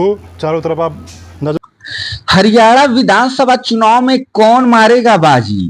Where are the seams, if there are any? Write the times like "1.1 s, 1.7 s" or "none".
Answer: 1.6 s